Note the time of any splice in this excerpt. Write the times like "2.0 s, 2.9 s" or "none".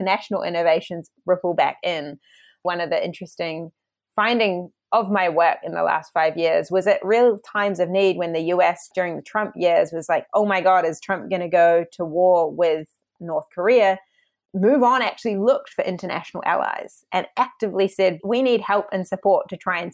2.6 s, 4.7 s, 8.9 s, 18.2 s